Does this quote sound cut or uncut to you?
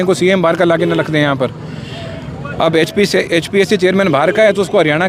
uncut